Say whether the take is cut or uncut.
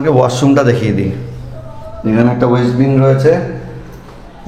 uncut